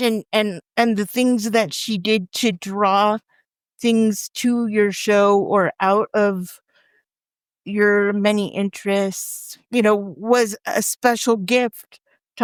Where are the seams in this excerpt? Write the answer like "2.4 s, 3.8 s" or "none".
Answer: none